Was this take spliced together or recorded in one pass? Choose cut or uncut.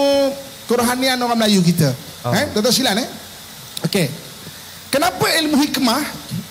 uncut